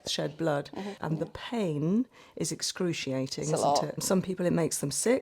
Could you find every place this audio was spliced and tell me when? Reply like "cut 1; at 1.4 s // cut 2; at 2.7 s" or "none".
cut 1; at 1.0 s // cut 2; at 4.0 s